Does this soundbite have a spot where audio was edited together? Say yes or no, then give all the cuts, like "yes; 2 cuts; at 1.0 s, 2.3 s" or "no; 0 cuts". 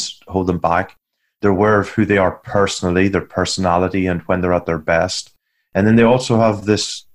no; 0 cuts